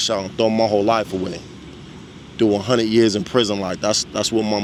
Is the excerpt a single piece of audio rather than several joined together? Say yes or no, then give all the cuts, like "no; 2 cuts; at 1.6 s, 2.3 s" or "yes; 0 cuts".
yes; 0 cuts